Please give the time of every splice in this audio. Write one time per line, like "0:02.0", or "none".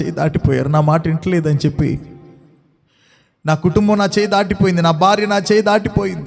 none